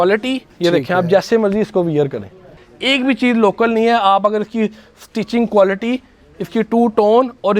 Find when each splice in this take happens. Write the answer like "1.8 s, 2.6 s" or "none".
2.5 s